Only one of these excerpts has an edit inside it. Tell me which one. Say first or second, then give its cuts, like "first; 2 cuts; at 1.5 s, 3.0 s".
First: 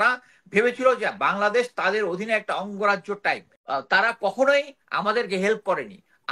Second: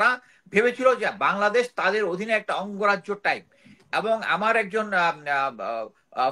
first; 1 cut; at 3.5 s